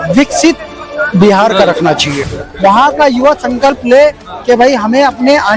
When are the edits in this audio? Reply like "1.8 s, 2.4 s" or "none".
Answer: 2.2 s